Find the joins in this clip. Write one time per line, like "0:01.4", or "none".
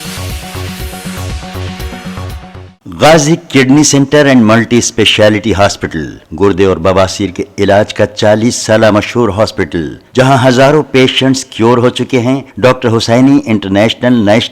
0:02.7